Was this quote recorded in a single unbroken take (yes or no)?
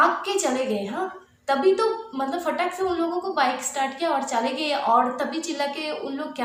yes